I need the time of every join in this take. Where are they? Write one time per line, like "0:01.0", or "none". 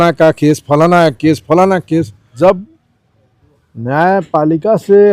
0:02.2